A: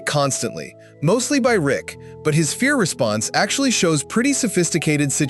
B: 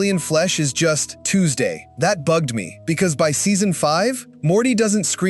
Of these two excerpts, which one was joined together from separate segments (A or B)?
B